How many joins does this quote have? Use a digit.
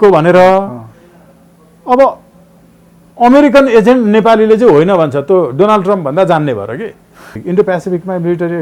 1